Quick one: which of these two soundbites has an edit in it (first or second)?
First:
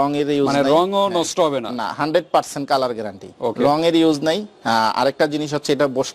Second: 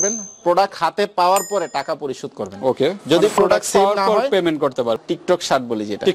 second